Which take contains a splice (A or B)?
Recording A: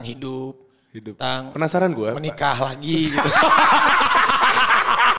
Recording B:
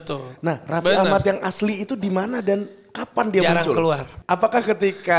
B